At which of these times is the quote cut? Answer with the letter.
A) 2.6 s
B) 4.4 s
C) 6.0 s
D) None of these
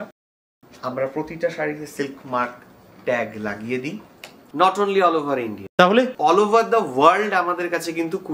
B